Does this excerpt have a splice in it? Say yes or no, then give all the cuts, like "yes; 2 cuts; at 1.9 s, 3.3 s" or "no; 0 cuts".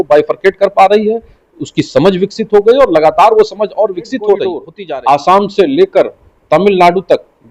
yes; 1 cut; at 4.7 s